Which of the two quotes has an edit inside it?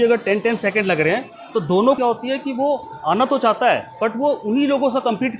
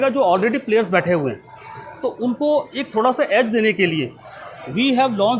first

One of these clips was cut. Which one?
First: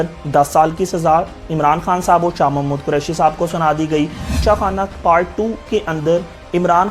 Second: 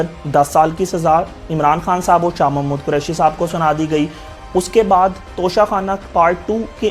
first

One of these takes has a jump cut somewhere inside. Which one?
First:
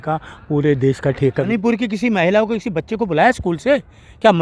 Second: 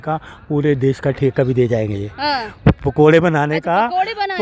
first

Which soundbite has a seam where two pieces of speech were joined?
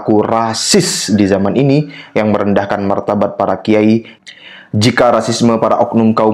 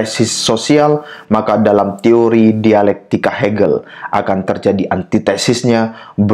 first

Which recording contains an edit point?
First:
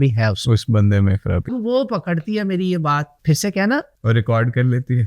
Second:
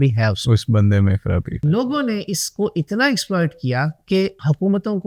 first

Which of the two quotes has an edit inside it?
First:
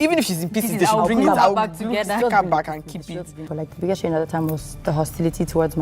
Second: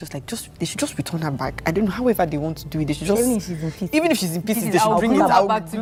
first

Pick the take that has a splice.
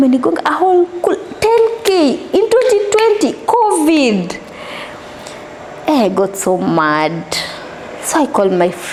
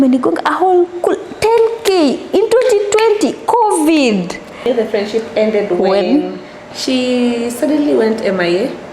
second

